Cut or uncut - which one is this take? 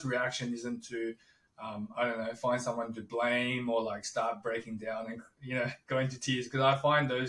uncut